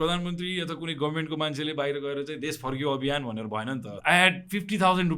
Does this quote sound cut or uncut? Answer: cut